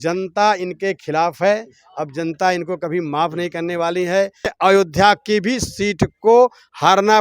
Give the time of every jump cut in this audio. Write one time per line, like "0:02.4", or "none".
0:04.5